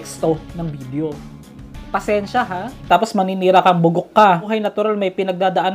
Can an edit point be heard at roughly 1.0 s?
no; 2 cuts; at 2.9 s, 4.5 s

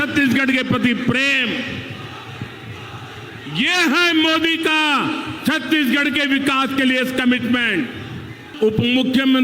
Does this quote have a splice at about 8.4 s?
yes; 1 cut; at 8.4 s

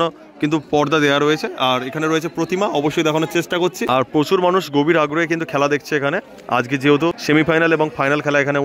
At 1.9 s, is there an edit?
no; 2 cuts; at 3.8 s, 7.2 s

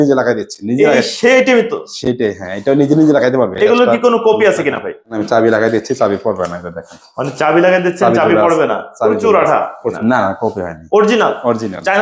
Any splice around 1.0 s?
no; 2 cuts; at 5.2 s, 9.9 s

